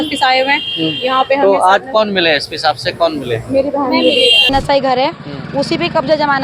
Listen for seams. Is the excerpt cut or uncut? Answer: cut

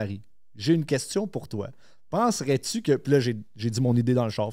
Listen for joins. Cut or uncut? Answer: uncut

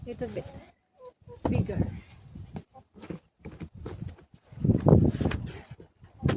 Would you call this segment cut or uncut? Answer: cut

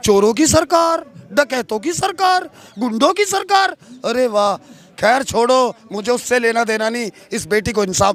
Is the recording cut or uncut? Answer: uncut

